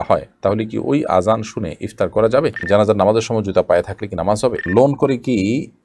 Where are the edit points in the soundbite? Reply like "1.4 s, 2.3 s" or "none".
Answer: 2.6 s, 4.7 s